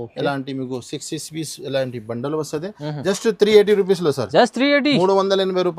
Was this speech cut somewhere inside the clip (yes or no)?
no